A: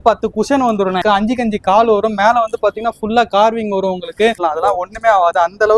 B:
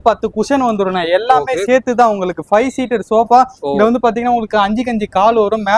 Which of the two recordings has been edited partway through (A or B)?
A